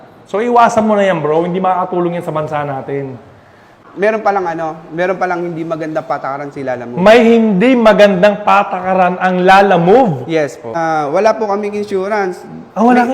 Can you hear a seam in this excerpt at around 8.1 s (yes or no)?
no